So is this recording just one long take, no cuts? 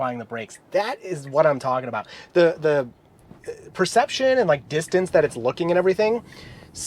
yes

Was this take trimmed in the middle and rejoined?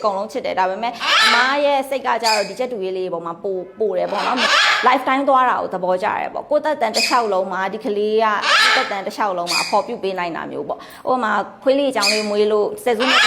yes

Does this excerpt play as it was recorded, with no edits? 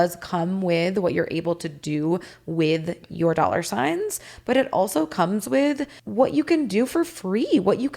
no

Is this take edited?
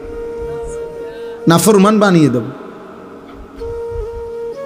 no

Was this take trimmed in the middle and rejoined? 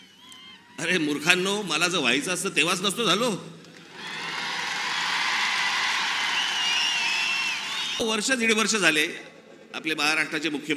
yes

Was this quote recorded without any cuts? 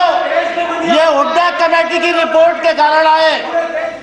yes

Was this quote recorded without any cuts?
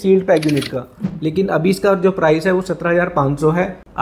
no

